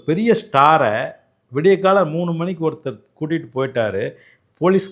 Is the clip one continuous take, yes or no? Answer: yes